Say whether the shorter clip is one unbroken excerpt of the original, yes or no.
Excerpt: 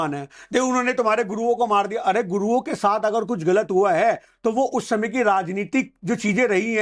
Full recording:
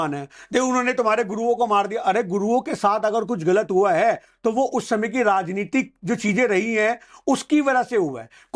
yes